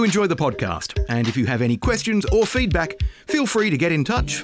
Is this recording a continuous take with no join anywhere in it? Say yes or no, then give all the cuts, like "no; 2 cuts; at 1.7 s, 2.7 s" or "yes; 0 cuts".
yes; 0 cuts